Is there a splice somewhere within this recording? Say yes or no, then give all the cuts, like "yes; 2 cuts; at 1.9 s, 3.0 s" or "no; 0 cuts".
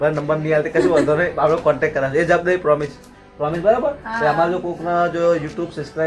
no; 0 cuts